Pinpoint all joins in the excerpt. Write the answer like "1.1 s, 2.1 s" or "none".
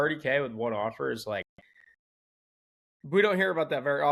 none